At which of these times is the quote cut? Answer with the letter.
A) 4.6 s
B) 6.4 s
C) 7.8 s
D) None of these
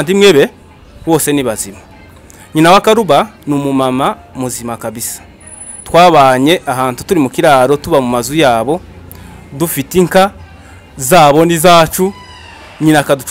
D